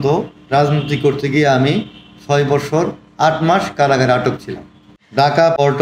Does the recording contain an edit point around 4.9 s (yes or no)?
no